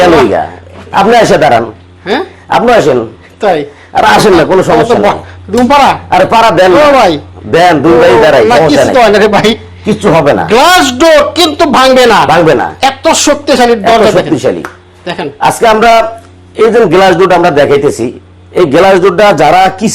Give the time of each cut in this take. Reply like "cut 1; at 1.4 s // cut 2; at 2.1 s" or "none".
none